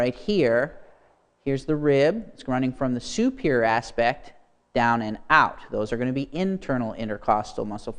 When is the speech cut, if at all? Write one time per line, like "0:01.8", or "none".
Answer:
0:05.2